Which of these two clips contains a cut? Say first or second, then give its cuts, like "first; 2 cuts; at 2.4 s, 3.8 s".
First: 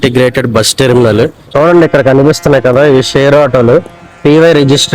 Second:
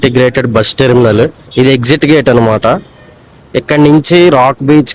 first; 1 cut; at 1.4 s